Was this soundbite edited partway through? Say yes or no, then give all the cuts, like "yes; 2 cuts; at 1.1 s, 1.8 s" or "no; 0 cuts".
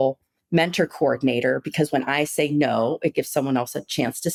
no; 0 cuts